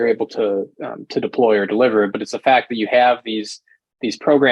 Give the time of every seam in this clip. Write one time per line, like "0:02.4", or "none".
none